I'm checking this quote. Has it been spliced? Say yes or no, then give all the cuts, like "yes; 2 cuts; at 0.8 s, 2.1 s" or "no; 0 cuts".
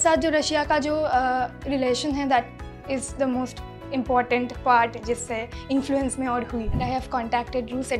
no; 0 cuts